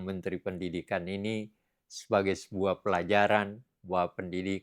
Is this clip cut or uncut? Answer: uncut